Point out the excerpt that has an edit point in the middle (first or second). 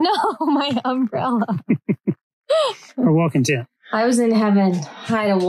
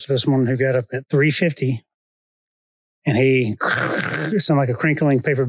first